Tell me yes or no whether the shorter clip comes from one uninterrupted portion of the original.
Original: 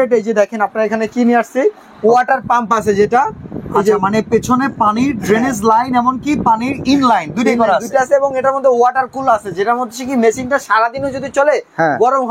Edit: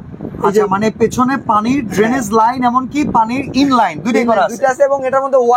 yes